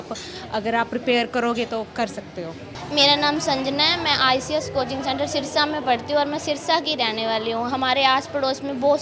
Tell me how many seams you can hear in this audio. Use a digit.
0